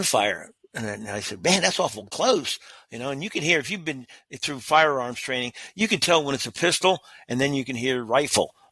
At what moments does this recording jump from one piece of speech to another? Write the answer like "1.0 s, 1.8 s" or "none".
2.1 s

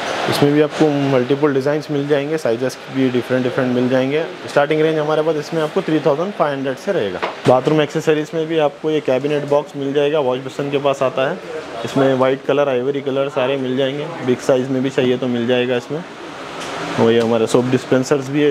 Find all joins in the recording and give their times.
none

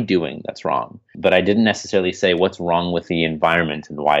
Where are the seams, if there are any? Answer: 1.1 s

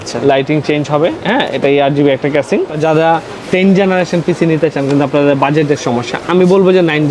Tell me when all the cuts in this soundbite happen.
2.7 s

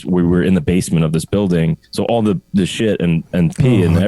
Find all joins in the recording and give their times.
1.8 s

